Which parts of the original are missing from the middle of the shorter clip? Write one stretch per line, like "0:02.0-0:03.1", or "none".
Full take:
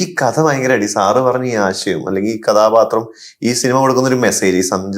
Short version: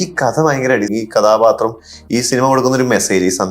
0:00.9-0:02.2